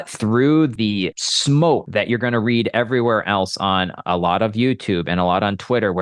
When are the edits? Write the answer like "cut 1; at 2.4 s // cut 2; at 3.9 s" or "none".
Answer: cut 1; at 0.7 s // cut 2; at 1.9 s